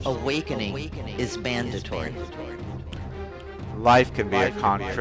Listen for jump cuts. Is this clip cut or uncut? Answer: uncut